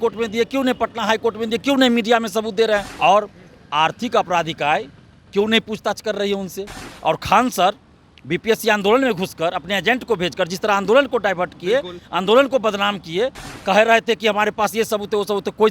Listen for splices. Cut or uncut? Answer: cut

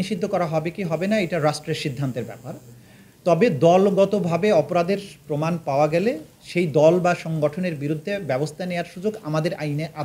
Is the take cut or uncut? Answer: uncut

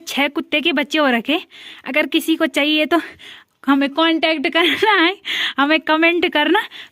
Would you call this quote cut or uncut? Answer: uncut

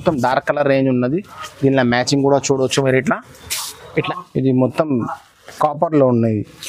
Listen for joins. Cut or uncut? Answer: cut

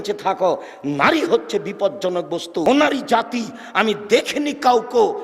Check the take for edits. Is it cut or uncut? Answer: cut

